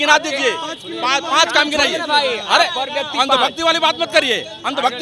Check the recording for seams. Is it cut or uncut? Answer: uncut